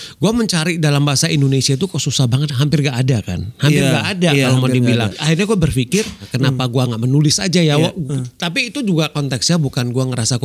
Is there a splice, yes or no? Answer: yes